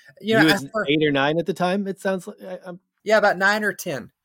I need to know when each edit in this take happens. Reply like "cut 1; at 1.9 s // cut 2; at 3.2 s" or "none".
cut 1; at 2.9 s